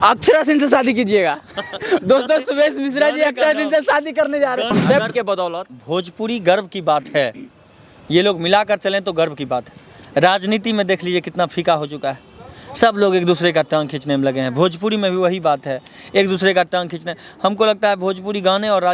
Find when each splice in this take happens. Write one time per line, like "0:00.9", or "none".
0:04.7